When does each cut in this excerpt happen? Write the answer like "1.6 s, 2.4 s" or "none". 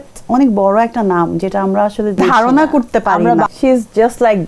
2.2 s, 3.5 s